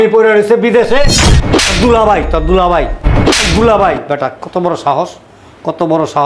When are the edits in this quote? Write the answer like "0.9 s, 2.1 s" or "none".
1.2 s

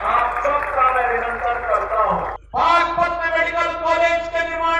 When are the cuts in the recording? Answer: 2.4 s

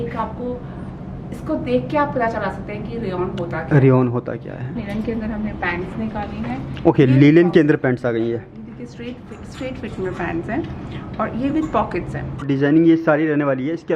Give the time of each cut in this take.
4.8 s, 12.4 s

